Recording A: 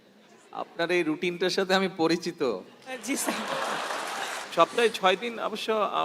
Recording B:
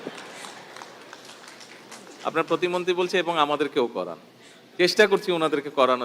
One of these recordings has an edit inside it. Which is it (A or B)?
A